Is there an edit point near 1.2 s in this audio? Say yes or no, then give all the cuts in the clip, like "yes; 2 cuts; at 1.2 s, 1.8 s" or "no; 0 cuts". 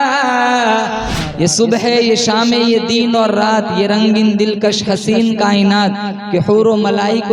yes; 1 cut; at 1.2 s